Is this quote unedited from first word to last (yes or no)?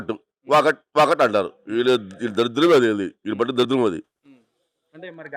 yes